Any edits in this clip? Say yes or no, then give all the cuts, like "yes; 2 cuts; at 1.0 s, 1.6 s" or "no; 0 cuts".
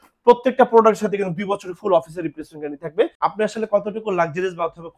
yes; 1 cut; at 3.1 s